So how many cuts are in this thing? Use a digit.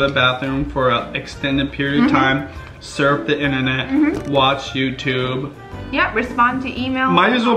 0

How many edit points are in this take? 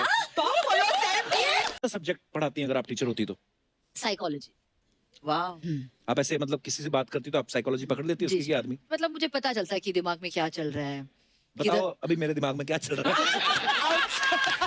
1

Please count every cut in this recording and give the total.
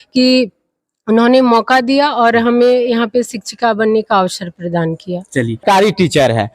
1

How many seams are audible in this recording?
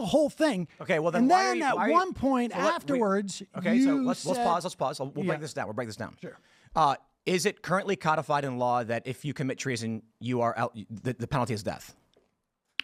0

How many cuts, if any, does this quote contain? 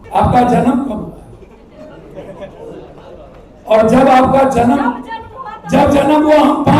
0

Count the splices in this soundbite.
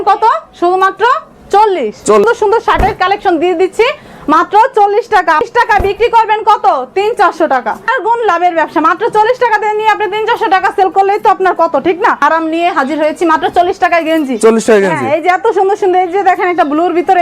4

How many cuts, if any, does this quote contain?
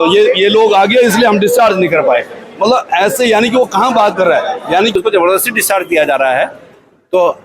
1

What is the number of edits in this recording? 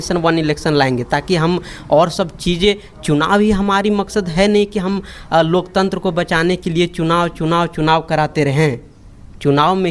0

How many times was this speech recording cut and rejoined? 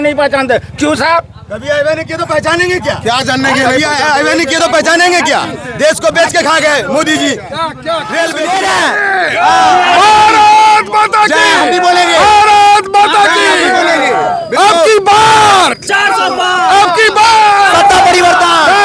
1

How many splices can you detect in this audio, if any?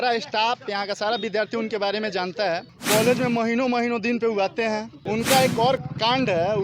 2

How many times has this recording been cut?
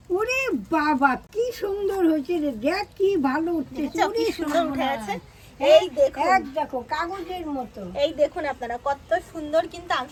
0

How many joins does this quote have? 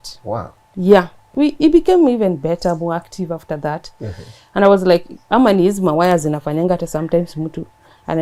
1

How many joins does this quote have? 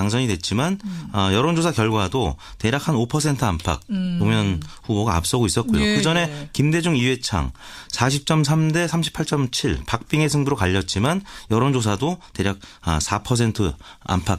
0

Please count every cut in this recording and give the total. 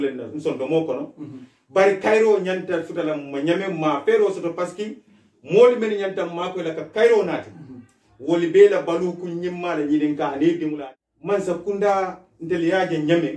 1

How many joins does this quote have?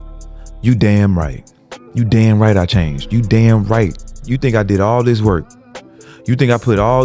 1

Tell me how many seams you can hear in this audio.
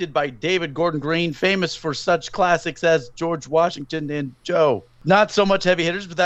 1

